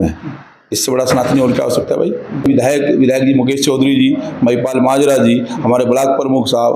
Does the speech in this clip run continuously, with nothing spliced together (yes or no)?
no